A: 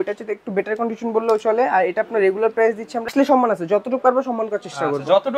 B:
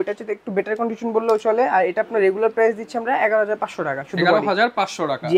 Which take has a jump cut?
A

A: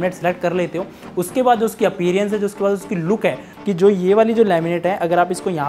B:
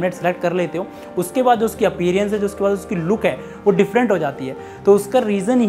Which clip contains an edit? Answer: A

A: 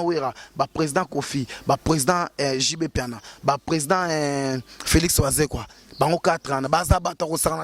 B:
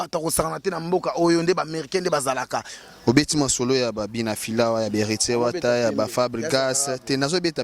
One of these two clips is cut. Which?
B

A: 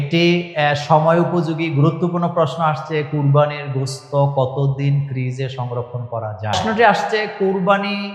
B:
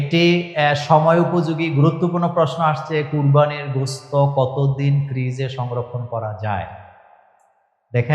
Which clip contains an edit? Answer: A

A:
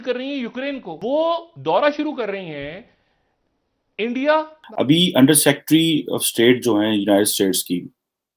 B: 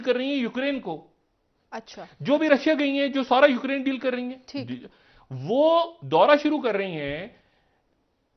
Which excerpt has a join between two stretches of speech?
A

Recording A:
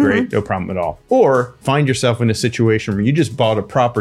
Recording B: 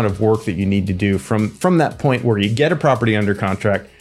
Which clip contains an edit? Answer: A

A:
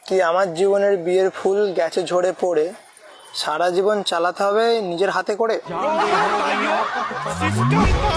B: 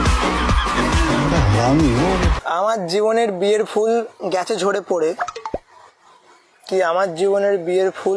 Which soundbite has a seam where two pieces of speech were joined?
B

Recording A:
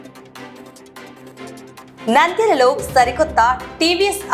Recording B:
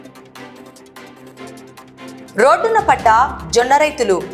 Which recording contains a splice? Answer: A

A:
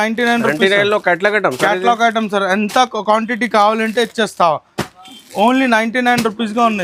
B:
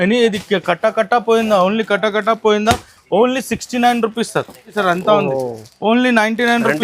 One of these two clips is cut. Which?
B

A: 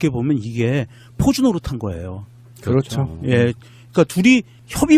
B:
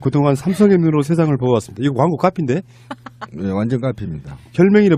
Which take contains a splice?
A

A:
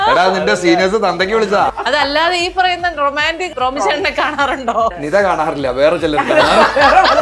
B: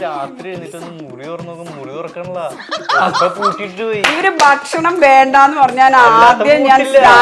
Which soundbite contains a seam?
A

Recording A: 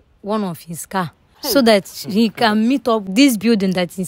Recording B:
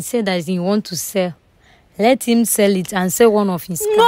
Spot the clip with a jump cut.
A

